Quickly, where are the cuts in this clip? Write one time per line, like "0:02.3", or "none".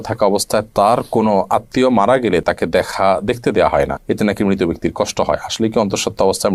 none